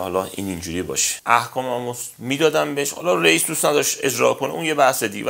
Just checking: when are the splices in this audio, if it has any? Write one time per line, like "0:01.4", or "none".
0:01.1